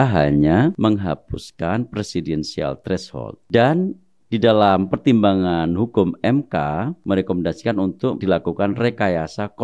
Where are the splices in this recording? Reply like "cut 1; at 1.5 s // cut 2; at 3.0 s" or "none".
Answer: cut 1; at 0.8 s // cut 2; at 3.4 s // cut 3; at 7.0 s // cut 4; at 8.2 s